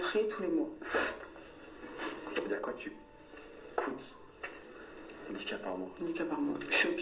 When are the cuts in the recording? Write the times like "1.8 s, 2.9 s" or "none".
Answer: 2.5 s